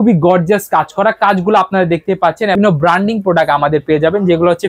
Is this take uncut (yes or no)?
no